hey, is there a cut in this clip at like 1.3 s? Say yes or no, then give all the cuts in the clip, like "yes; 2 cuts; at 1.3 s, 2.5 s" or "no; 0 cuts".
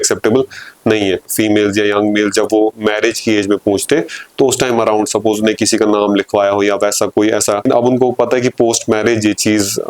yes; 2 cuts; at 1.3 s, 7.6 s